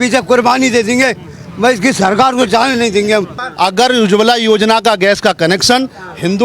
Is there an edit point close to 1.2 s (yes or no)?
no